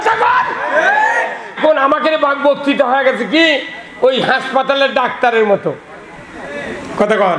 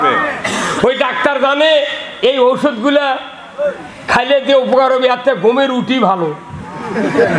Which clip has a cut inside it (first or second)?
first